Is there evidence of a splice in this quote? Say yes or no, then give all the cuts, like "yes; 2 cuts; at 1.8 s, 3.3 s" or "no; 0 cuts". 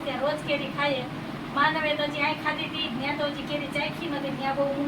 no; 0 cuts